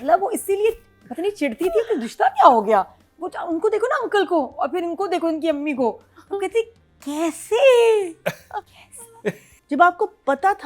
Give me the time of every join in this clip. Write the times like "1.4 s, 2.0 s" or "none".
9.5 s